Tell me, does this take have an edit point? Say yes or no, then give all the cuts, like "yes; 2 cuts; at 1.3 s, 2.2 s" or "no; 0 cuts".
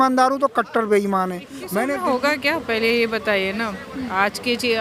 yes; 1 cut; at 1.6 s